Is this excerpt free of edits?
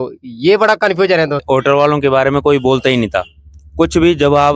no; 1 cut; at 1.4 s

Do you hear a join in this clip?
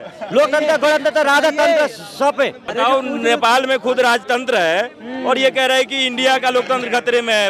yes; 1 cut; at 2.6 s

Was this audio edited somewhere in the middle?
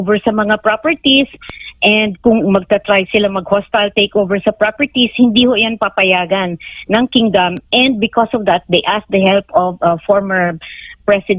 no; 0 cuts

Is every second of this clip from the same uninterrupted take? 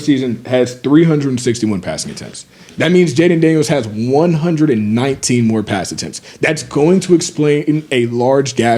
yes; 0 cuts

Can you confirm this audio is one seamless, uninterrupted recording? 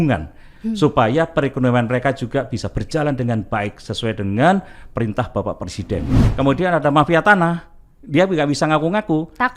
no; 1 cut; at 6.2 s

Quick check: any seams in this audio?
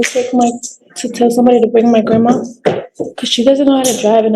no; 0 cuts

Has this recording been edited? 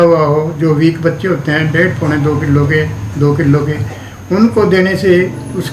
no; 0 cuts

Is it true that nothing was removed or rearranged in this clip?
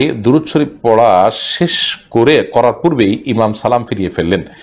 yes; 0 cuts

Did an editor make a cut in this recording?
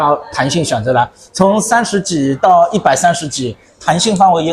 no; 0 cuts

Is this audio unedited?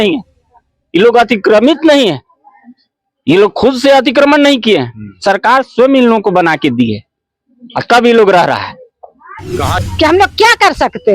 no; 1 cut; at 9.7 s

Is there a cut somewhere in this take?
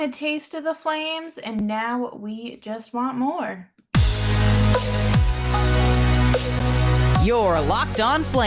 no; 0 cuts

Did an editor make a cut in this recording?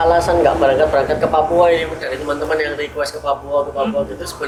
no; 0 cuts

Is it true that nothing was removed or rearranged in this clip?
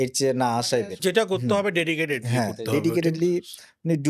no; 1 cut; at 1.0 s

